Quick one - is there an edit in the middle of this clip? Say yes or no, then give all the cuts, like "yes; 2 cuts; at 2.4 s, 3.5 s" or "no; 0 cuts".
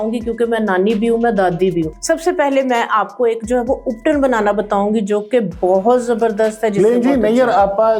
yes; 1 cut; at 1.9 s